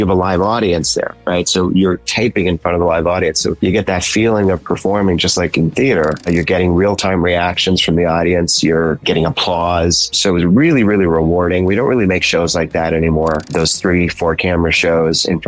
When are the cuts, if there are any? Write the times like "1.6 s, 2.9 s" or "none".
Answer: 3.6 s, 6.2 s, 9.0 s, 10.2 s, 13.5 s